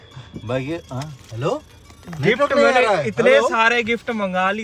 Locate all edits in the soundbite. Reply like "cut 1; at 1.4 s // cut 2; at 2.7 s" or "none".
none